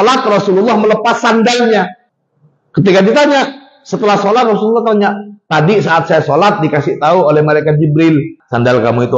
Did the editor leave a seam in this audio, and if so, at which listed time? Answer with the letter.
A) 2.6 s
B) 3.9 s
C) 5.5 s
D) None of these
A